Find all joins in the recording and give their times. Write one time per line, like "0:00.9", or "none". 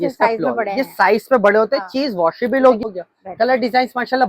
0:02.8